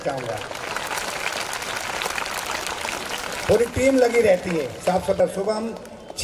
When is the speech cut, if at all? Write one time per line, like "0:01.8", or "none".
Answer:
0:05.2